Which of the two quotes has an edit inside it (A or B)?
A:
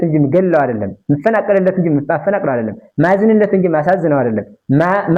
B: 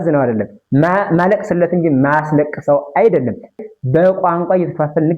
B